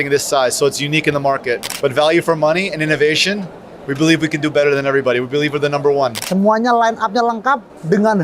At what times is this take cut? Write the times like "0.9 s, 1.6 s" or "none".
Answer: 1.7 s, 6.2 s